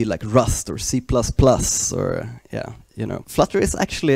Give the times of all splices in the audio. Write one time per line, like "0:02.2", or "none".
0:03.2